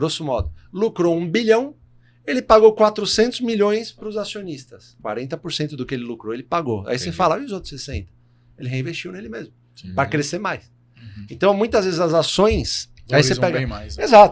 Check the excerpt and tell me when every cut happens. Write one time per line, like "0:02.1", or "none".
none